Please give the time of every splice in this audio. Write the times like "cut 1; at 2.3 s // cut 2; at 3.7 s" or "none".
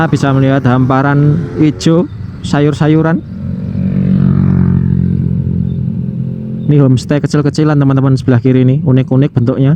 none

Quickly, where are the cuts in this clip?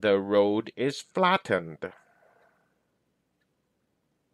none

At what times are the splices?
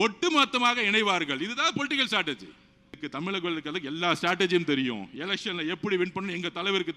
cut 1; at 3.0 s

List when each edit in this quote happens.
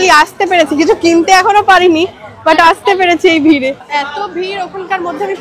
cut 1; at 3.8 s

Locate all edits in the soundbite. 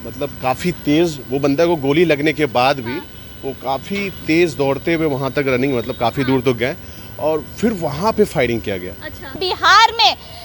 cut 1; at 9.2 s

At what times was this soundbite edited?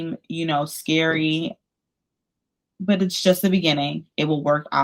none

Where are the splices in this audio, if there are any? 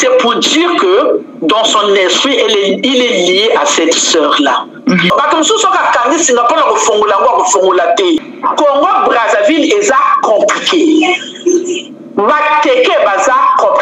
cut 1; at 5.1 s // cut 2; at 8.2 s

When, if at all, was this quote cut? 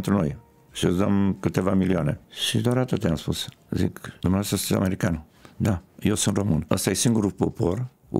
cut 1; at 2.3 s // cut 2; at 4.1 s // cut 3; at 6.6 s

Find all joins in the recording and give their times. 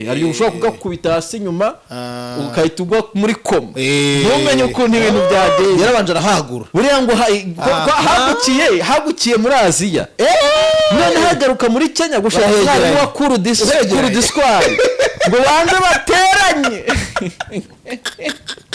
none

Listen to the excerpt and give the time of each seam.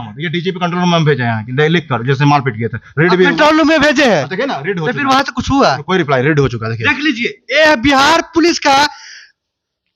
none

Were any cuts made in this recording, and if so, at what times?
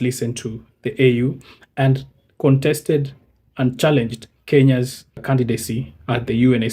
cut 1; at 5.2 s

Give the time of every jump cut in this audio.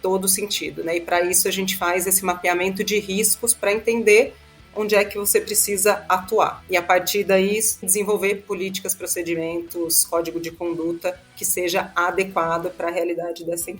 cut 1; at 7.9 s

